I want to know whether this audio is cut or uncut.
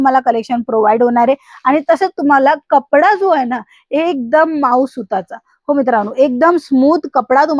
uncut